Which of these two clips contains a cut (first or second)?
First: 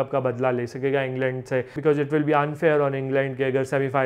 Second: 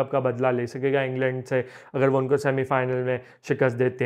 first